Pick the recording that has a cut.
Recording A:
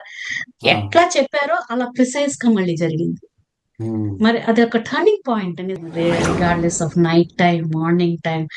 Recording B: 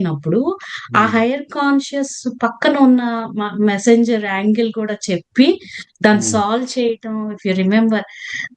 A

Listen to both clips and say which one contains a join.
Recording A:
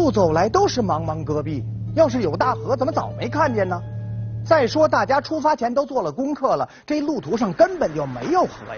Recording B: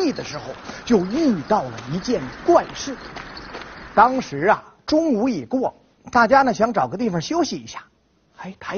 A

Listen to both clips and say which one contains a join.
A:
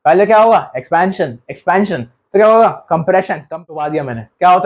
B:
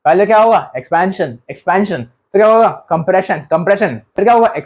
A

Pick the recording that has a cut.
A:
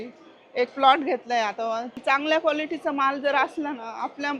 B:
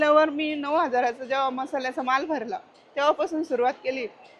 A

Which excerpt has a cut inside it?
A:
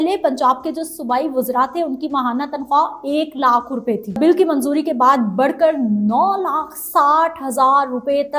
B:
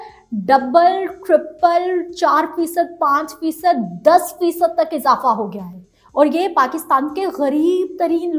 A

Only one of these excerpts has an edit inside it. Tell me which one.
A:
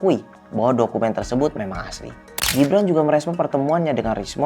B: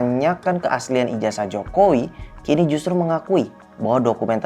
A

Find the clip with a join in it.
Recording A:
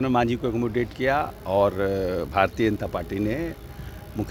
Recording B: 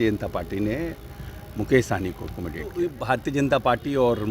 B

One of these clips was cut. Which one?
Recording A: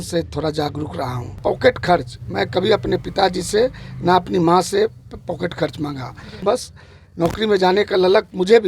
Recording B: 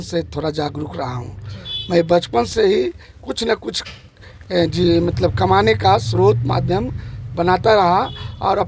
A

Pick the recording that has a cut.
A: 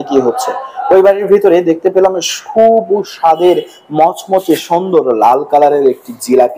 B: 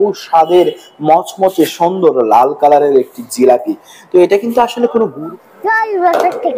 B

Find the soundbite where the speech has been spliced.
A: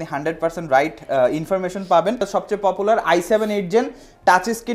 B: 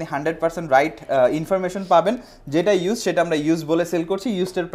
A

